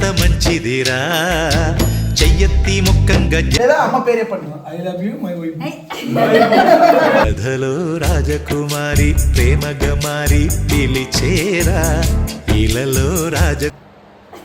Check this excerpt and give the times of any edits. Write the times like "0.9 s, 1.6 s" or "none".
3.6 s, 13.7 s